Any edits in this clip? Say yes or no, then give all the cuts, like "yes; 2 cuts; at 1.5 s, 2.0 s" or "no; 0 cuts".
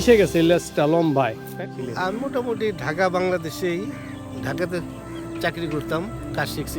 yes; 1 cut; at 1.5 s